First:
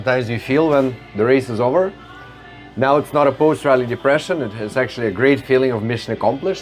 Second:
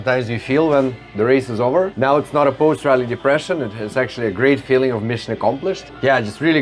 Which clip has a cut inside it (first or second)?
second